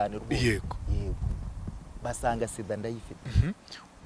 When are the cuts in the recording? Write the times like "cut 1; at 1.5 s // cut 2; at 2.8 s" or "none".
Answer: none